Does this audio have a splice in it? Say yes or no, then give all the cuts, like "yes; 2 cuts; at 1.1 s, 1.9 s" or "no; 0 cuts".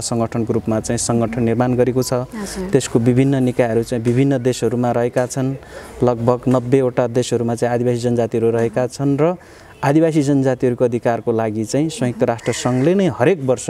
no; 0 cuts